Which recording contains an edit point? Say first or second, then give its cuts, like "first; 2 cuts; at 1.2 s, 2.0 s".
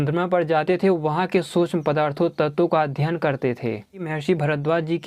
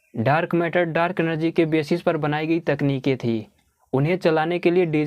first; 1 cut; at 4.1 s